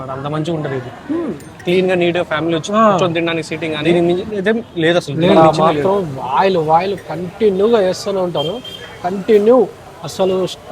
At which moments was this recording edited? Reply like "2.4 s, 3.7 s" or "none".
3.8 s, 5.4 s